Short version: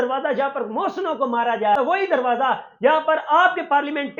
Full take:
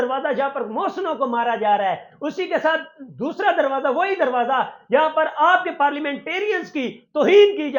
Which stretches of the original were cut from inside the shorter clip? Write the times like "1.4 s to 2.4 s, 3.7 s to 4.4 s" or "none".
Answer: 1.8 s to 3.9 s